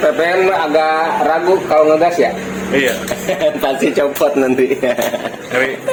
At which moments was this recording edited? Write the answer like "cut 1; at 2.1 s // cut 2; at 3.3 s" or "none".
none